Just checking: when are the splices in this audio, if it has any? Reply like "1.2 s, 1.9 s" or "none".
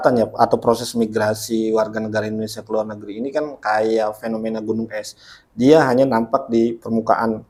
none